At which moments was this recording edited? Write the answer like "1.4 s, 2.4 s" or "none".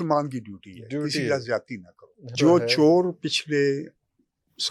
2.4 s